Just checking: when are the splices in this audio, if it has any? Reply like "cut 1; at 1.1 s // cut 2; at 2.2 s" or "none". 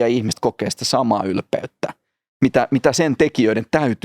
none